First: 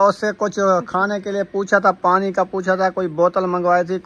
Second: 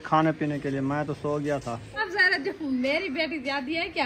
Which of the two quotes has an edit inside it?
second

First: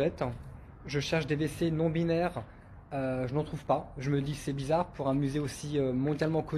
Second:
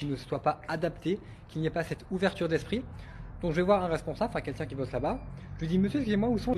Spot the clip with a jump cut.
first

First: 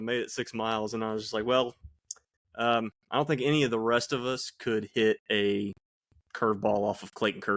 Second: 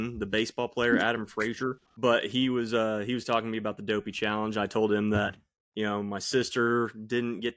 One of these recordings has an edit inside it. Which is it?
second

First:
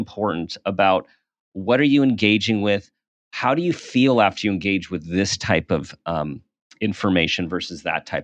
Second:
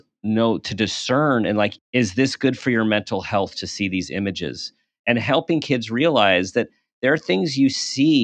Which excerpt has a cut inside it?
second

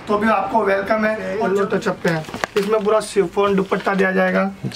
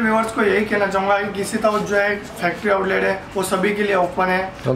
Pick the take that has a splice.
first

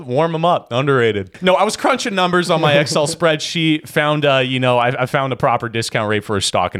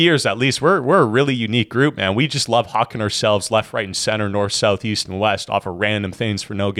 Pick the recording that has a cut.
first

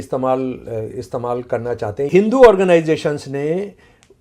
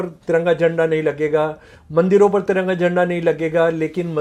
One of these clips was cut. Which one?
first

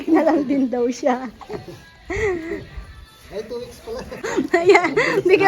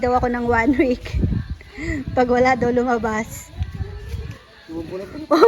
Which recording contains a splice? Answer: first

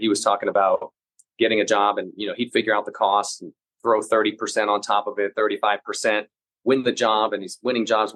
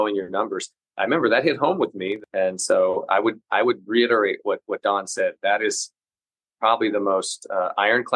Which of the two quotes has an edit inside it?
second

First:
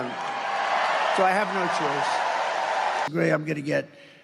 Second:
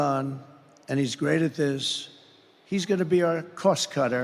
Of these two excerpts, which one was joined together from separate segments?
first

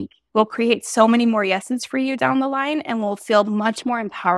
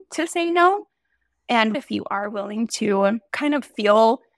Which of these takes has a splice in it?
second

